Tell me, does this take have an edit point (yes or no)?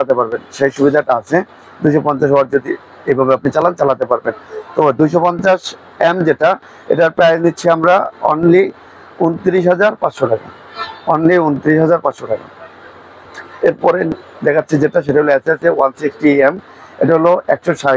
no